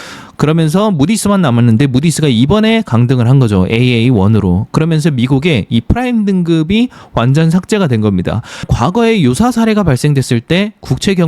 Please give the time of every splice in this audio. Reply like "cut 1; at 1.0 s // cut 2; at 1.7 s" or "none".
cut 1; at 8.7 s